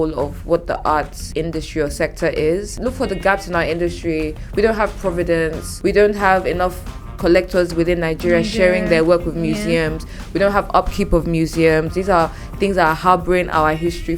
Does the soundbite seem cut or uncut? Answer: cut